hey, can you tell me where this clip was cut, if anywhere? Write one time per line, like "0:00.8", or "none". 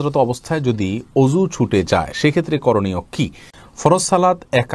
0:03.5